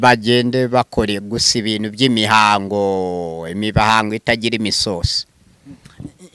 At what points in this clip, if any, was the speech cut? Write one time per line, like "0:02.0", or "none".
none